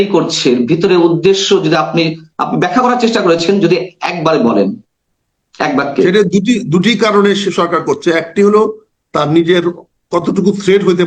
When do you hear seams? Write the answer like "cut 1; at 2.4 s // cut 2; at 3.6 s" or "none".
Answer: none